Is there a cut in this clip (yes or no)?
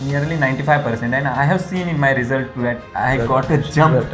no